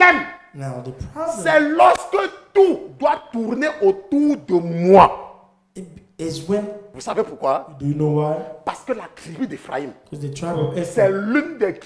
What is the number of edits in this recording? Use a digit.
1